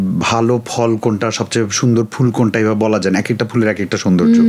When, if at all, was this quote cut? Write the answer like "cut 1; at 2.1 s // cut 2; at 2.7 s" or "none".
none

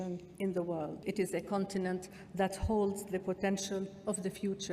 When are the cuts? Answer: cut 1; at 1.0 s

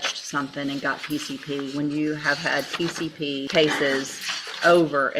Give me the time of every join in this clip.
cut 1; at 3.5 s

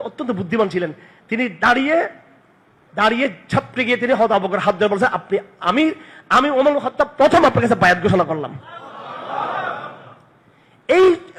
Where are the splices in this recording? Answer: none

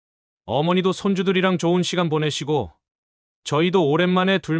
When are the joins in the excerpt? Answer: none

